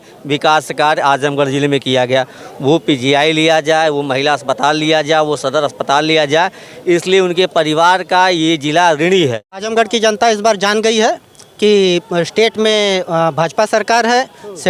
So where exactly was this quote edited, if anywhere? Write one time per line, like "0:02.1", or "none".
0:09.7